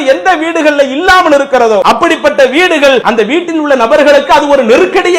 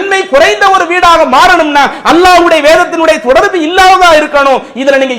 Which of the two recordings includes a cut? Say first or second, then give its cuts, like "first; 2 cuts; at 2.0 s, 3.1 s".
first; 2 cuts; at 1.8 s, 3.0 s